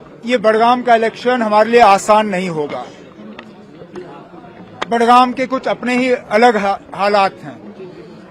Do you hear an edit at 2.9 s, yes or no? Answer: no